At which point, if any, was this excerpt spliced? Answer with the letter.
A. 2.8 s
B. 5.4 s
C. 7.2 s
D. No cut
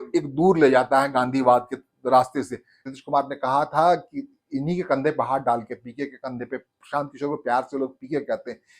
A